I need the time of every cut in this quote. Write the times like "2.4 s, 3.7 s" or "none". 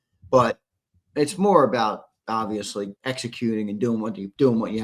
2.9 s